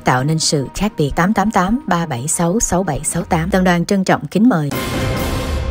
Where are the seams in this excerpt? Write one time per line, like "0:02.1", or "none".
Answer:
0:04.7

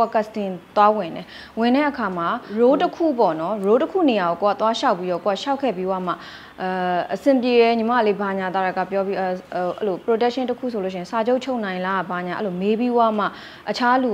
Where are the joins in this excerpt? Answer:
0:02.4

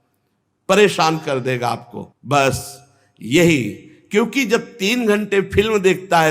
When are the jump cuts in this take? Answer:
none

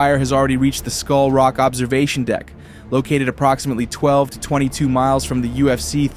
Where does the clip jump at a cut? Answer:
none

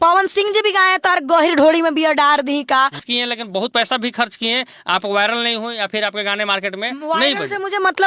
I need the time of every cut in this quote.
0:03.0

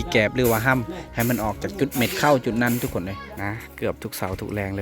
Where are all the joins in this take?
0:03.2

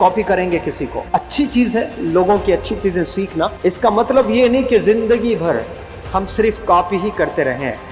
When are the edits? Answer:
0:00.9
0:03.5

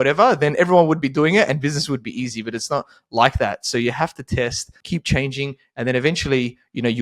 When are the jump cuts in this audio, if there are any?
0:04.8

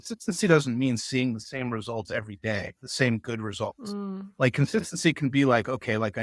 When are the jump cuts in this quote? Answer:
none

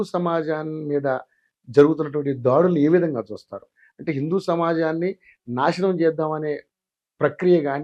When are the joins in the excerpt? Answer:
none

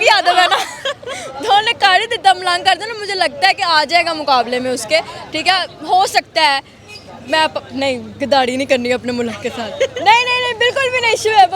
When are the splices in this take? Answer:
none

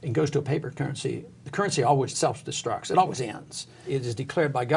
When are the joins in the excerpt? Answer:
0:02.1
0:03.8

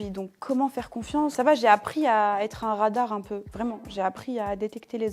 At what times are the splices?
0:01.3
0:03.5

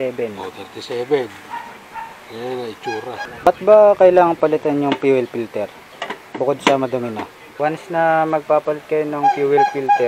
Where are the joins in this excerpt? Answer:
0:03.5
0:07.5

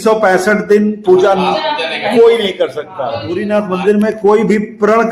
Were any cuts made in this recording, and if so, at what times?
0:03.4

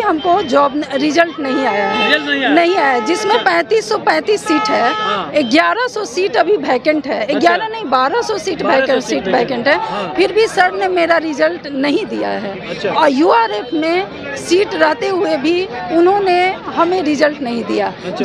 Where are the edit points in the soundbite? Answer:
none

